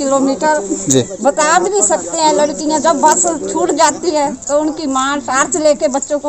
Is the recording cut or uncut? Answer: uncut